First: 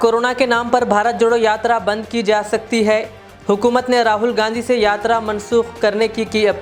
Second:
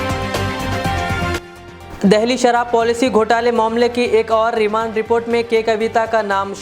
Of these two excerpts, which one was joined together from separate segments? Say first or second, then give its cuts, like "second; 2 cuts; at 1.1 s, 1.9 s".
second; 1 cut; at 1.4 s